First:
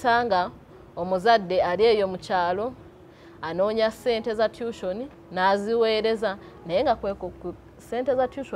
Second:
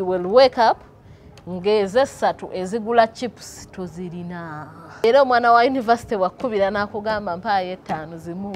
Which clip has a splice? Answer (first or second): second